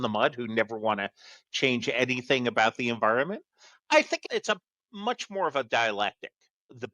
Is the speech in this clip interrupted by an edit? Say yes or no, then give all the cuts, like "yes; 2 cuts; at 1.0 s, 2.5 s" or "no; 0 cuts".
yes; 1 cut; at 4.2 s